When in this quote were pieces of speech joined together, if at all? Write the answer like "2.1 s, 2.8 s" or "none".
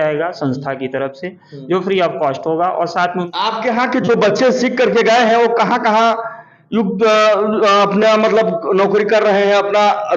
3.3 s